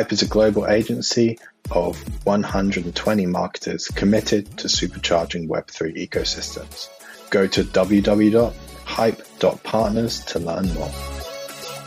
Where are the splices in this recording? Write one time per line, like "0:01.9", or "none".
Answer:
0:10.9